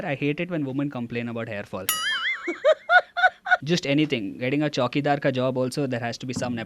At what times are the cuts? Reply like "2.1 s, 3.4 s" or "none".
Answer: 3.6 s